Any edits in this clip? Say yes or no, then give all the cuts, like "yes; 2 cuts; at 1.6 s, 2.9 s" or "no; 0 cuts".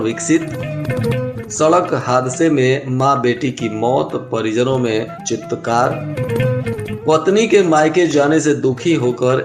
no; 0 cuts